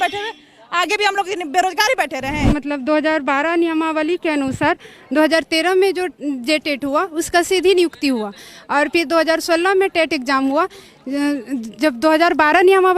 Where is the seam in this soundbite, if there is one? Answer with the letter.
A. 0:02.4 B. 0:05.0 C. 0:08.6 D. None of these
A